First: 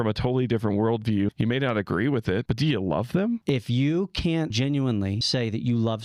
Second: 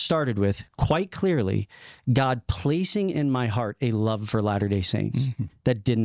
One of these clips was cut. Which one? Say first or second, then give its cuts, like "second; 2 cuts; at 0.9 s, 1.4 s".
first; 5 cuts; at 1.3 s, 2.5 s, 3.4 s, 4.5 s, 5.2 s